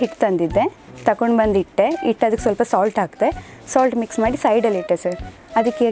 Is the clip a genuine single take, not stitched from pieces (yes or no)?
yes